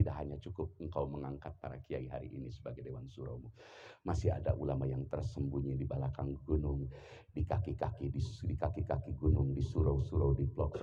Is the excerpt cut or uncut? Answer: uncut